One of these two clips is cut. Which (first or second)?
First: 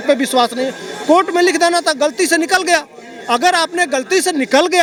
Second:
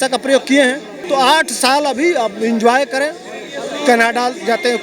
second